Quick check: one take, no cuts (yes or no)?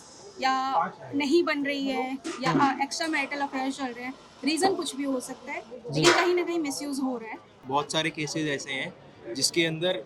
no